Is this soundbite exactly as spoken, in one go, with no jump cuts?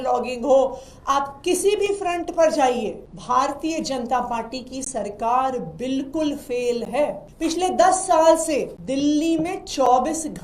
no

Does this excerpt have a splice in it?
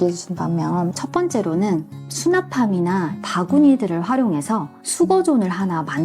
yes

